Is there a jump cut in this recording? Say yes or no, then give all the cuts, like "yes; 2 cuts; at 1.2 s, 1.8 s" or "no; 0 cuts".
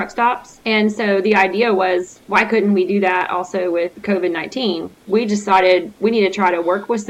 yes; 1 cut; at 4.9 s